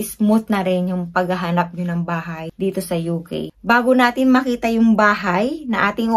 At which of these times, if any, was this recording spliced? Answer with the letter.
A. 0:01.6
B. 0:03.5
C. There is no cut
B